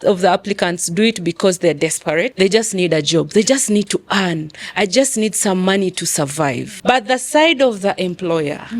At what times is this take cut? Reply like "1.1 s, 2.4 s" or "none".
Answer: 2.3 s, 6.7 s